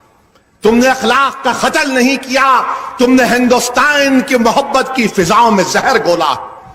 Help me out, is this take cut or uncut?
cut